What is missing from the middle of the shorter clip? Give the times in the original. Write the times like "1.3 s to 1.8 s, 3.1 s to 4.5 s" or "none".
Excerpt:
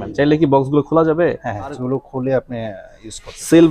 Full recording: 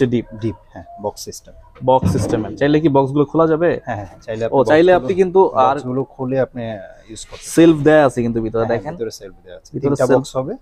4.2 s to 5.8 s